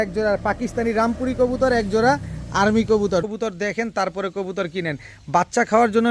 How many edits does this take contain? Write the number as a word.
one